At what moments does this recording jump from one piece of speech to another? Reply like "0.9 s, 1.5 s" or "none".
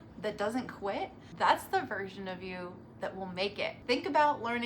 1.2 s, 3.8 s